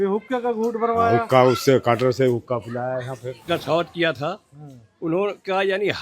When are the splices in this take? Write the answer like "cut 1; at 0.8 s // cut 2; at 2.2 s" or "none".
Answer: cut 1; at 3.5 s